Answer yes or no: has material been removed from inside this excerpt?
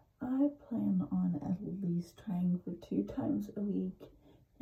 no